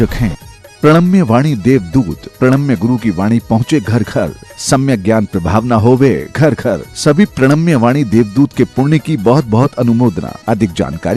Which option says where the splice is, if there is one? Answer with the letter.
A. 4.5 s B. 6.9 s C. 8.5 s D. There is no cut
D